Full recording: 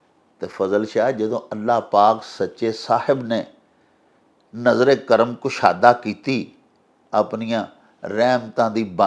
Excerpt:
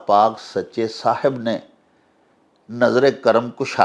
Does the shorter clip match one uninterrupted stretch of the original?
yes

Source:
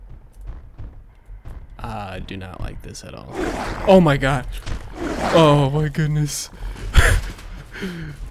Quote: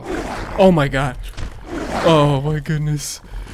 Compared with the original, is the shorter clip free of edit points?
yes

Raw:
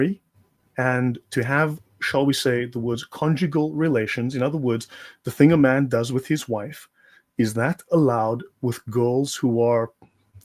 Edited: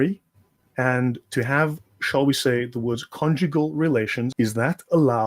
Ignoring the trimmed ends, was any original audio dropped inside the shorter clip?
yes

